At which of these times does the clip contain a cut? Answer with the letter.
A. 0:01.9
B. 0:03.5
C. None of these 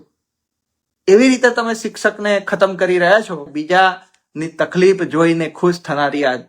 B